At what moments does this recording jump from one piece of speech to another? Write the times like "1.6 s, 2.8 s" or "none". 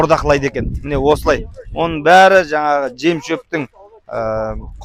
none